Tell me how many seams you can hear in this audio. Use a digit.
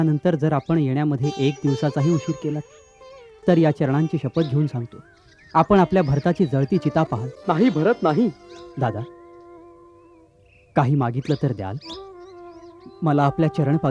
2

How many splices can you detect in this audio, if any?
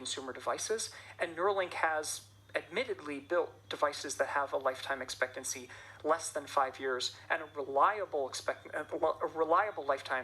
1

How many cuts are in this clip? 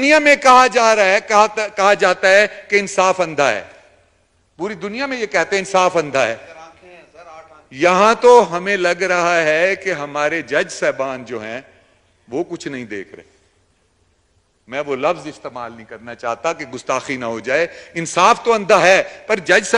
0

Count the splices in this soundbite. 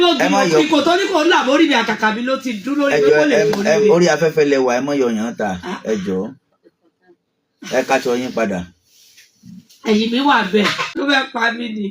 1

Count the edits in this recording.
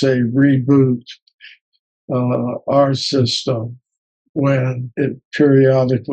0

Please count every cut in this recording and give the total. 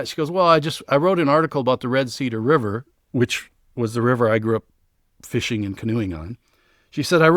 0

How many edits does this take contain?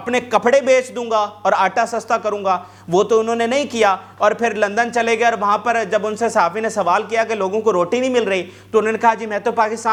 0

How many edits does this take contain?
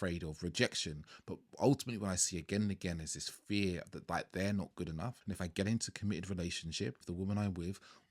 3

